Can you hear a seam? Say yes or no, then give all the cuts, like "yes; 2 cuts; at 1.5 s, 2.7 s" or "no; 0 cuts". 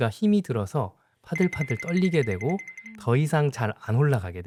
no; 0 cuts